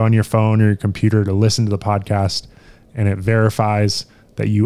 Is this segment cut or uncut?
uncut